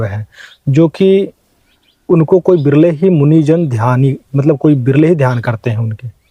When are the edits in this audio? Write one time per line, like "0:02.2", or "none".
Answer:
none